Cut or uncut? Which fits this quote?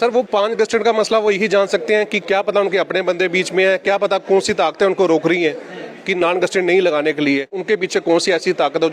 cut